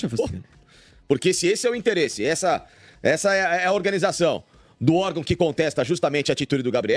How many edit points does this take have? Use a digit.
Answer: 0